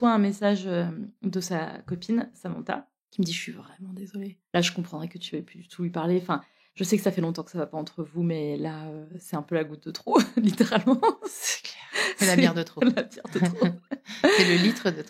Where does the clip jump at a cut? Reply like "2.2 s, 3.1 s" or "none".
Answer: 4.4 s, 6.6 s

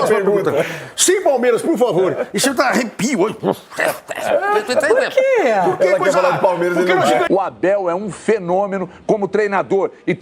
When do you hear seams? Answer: 7.3 s

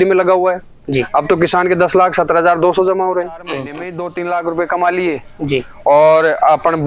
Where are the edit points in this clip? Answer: 3.8 s

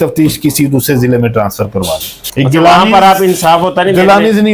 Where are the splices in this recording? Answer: none

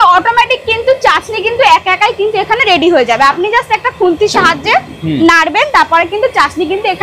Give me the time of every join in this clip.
none

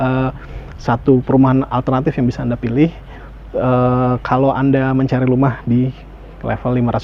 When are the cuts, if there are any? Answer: none

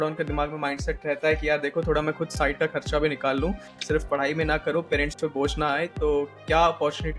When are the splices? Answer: none

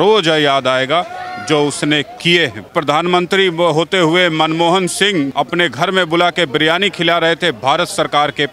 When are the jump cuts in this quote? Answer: 2.7 s, 5.3 s

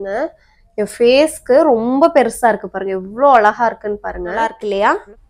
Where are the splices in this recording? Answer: 4.4 s

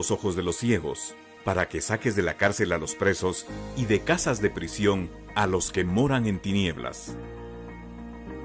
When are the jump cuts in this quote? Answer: 4.3 s

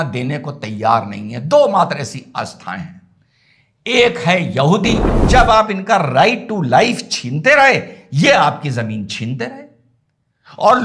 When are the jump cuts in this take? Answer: 5.1 s

